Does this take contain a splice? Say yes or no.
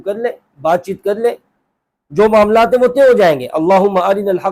no